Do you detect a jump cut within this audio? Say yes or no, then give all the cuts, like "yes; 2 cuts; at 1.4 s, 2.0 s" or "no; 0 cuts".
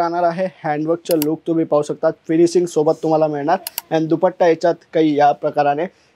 no; 0 cuts